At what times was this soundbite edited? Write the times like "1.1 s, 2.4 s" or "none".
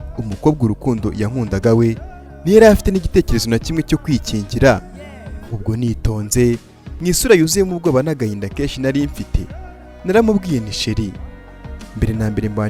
5.4 s